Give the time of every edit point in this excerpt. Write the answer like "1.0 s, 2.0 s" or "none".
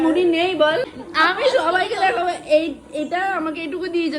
1.0 s